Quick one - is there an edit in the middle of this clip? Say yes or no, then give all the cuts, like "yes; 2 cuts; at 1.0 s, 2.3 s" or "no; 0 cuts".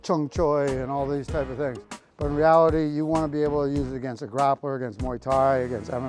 no; 0 cuts